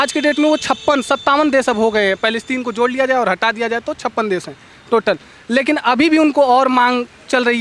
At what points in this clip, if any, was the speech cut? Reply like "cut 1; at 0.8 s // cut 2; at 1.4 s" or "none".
none